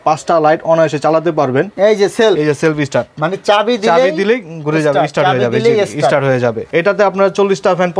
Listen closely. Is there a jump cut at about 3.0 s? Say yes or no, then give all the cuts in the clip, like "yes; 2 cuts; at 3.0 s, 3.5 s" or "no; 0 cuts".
no; 2 cuts; at 1.7 s, 6.6 s